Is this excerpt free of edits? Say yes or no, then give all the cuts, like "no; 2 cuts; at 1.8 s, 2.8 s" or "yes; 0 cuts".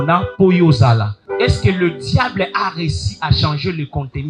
no; 1 cut; at 1.2 s